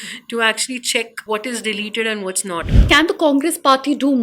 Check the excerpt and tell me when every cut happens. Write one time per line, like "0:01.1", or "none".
0:01.2
0:02.8